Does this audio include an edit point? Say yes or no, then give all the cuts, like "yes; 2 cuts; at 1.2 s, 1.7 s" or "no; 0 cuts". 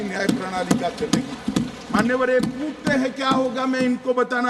no; 0 cuts